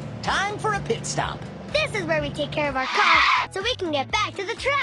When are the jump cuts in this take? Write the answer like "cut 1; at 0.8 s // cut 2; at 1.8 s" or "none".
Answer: cut 1; at 1.5 s